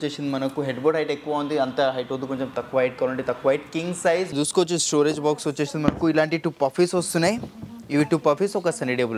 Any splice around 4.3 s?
yes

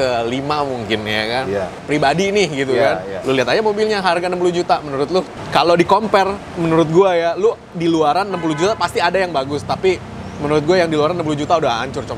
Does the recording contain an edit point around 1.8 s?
yes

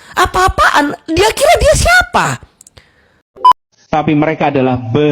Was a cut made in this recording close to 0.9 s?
no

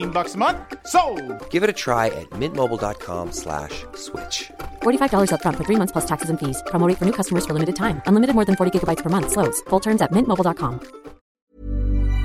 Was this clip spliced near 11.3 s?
yes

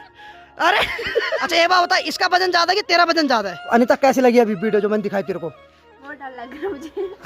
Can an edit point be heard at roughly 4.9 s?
no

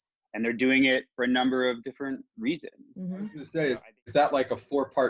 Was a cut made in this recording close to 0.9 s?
no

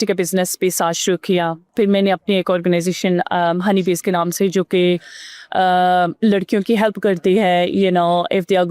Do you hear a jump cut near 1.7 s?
yes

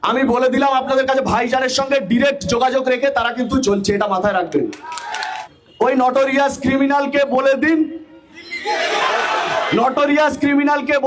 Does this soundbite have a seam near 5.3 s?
yes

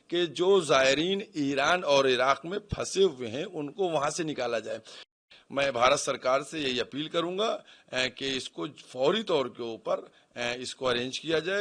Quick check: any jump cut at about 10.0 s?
no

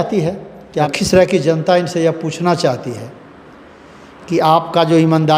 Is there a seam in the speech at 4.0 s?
no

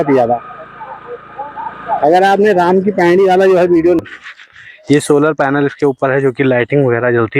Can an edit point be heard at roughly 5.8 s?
no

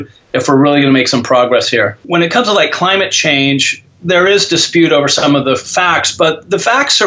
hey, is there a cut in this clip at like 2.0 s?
yes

